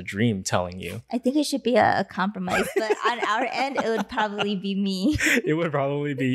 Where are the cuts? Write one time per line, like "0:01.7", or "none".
none